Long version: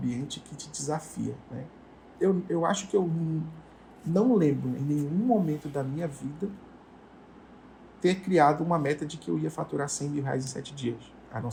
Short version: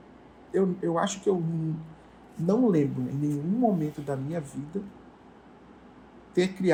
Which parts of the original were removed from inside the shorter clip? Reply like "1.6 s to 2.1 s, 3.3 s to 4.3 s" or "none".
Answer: none